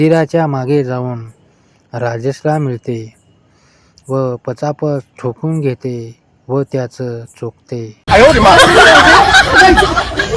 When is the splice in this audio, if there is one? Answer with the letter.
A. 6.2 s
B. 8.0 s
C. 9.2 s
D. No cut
B